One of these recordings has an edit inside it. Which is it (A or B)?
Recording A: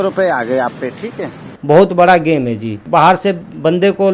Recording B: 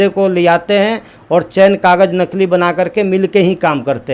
A